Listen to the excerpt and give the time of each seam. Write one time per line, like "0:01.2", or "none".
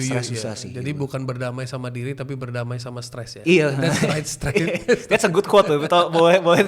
none